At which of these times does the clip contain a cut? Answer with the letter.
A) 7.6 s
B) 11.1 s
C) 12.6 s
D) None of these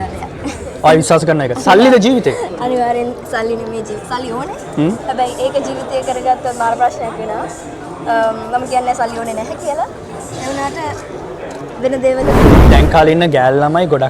C